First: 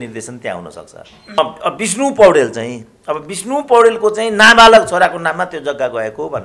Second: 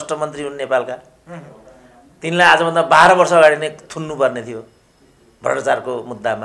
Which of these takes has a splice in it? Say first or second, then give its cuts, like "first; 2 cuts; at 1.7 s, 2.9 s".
first; 1 cut; at 1.4 s